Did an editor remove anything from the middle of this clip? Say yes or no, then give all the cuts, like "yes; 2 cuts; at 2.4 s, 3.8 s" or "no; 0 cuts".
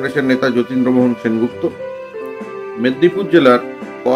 no; 0 cuts